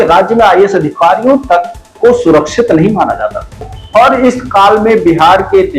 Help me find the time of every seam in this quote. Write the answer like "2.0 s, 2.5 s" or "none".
3.7 s